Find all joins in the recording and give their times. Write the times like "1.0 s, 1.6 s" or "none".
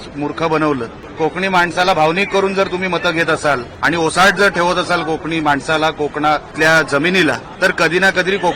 1.0 s, 3.7 s, 6.5 s, 7.5 s